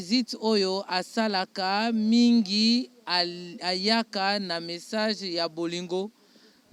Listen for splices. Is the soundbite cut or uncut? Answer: uncut